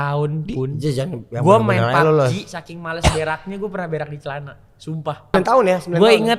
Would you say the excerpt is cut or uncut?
cut